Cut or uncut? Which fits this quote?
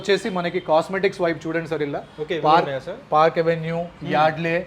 uncut